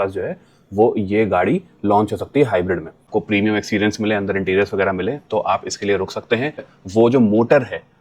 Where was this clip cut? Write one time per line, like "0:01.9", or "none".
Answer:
0:03.0
0:06.7